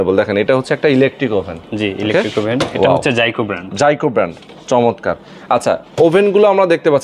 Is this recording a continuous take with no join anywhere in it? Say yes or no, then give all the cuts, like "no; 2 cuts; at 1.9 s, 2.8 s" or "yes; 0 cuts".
yes; 0 cuts